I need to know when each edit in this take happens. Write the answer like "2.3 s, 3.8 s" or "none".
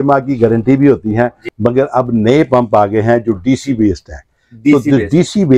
1.4 s